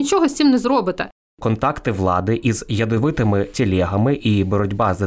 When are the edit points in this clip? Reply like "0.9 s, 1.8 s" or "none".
1.4 s